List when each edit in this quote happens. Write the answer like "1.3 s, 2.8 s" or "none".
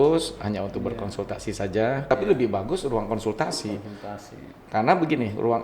2.0 s